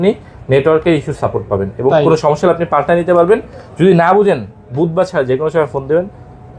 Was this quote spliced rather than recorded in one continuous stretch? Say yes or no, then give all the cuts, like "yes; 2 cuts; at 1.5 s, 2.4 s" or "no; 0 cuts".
no; 0 cuts